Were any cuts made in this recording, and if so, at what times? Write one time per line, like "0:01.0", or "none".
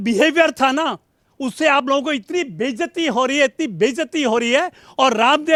none